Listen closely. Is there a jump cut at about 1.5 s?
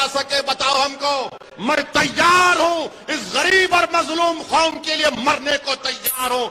yes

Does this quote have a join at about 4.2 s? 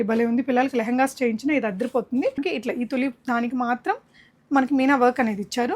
no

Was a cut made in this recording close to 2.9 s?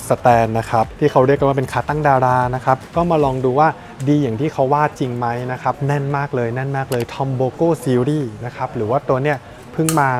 no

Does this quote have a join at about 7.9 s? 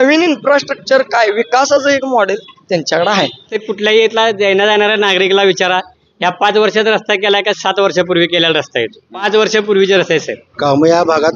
no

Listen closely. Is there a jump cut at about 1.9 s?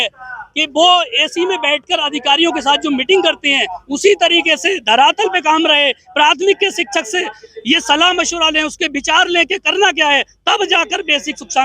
no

